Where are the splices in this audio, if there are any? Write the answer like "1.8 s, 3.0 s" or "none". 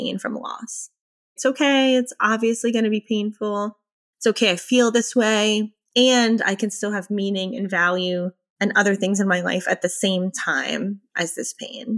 1.2 s